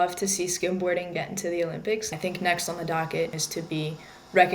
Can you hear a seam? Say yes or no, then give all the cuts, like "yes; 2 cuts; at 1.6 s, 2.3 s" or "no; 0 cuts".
yes; 2 cuts; at 2.1 s, 3.4 s